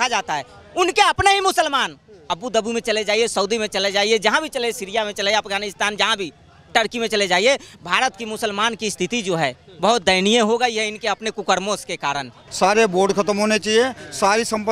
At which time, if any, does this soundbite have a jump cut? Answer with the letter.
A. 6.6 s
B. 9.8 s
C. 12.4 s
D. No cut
C